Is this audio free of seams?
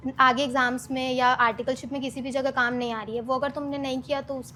yes; 0 cuts

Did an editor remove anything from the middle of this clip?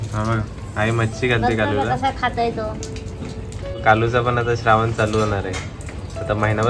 yes; 1 cut; at 3.8 s

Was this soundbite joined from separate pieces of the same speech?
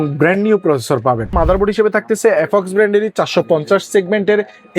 yes; 1 cut; at 1.3 s

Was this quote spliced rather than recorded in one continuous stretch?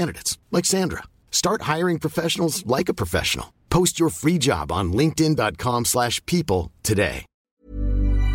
yes; 1 cut; at 7.4 s

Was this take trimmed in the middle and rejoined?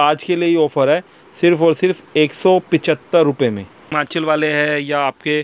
yes; 1 cut; at 4.0 s

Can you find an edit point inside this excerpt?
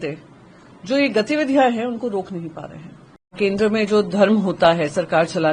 yes; 1 cut; at 3.3 s

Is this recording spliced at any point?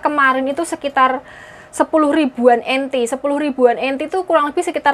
no; 0 cuts

